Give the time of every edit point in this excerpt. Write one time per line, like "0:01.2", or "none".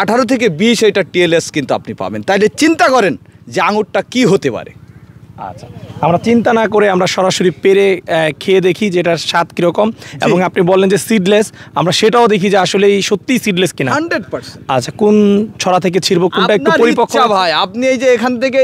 none